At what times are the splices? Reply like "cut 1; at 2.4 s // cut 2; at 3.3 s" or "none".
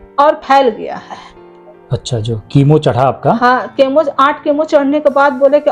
none